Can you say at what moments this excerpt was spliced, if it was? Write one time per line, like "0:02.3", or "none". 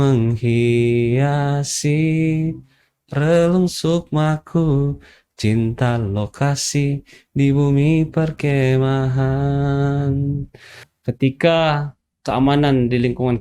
0:10.9